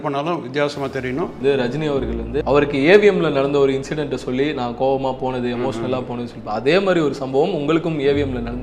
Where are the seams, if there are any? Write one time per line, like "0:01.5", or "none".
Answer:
0:01.4
0:02.4